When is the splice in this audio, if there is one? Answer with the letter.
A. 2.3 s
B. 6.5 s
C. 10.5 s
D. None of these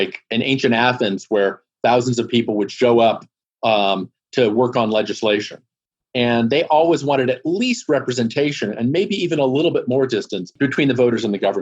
C